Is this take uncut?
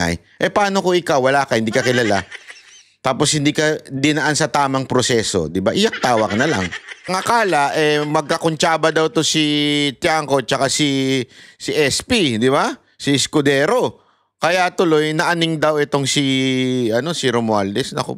no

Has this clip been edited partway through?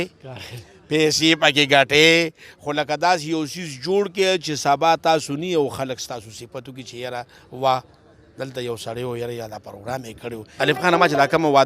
yes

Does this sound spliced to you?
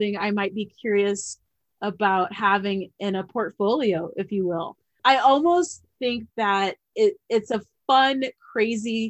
no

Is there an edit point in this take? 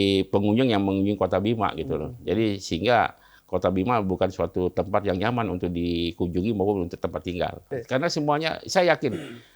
yes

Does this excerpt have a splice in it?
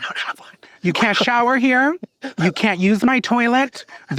no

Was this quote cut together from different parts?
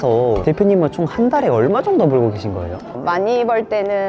no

